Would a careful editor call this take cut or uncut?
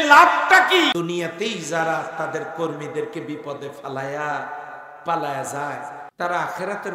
cut